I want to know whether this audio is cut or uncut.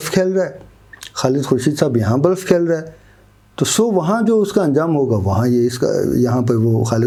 uncut